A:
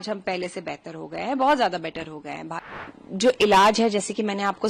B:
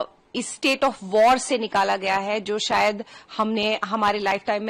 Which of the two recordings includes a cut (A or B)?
A